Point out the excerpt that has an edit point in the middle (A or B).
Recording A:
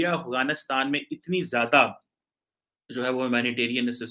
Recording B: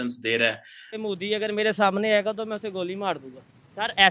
B